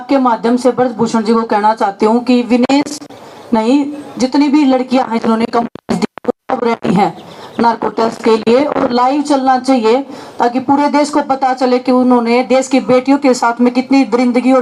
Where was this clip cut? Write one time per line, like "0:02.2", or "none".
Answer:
none